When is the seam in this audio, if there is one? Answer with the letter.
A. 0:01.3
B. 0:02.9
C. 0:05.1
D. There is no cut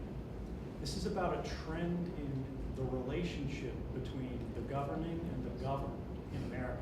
A